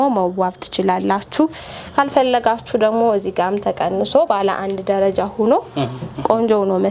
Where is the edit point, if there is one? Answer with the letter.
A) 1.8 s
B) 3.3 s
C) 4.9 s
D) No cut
D